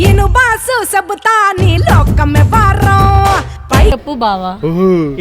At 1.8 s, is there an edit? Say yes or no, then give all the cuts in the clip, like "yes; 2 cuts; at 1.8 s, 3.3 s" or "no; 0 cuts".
no; 1 cut; at 3.9 s